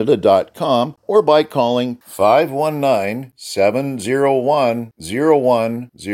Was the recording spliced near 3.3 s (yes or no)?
no